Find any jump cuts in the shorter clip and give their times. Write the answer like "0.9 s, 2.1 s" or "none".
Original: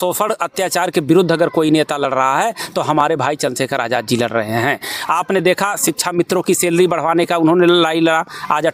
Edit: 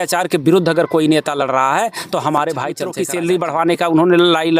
2.9 s